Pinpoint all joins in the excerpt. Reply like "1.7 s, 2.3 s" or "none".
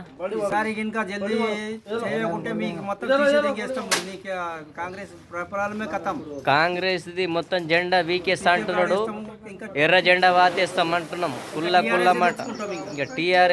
none